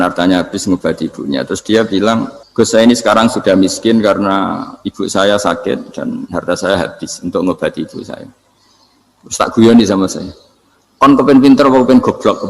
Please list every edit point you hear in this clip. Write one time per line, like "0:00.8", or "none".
0:02.4